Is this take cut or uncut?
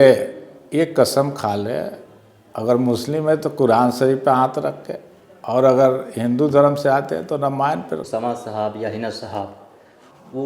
cut